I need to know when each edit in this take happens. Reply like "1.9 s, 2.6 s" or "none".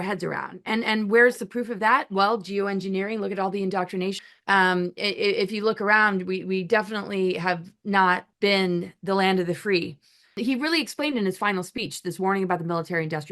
4.2 s, 8.3 s, 10.4 s